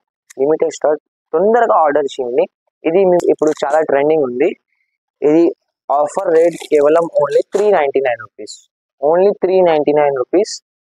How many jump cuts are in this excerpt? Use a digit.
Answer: 1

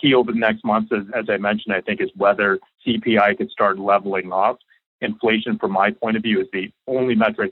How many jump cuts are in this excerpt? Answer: 2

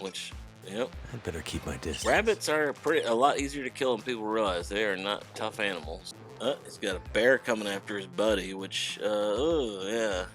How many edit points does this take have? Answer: 1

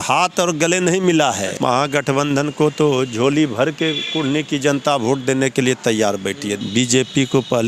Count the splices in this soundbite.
2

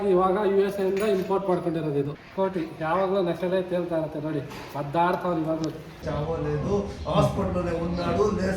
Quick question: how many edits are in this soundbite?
2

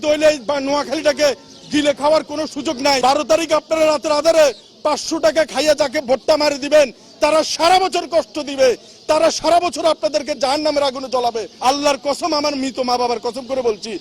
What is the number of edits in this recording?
2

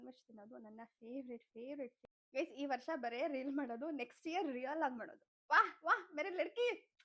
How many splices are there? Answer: 1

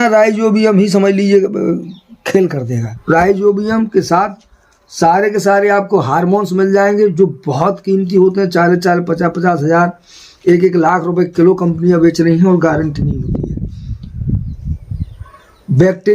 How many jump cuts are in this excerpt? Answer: 1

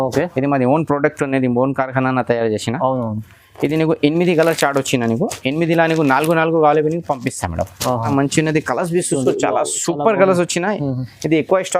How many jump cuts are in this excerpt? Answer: 1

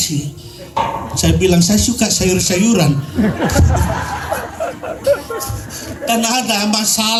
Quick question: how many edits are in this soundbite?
0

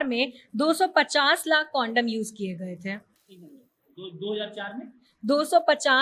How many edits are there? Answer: 0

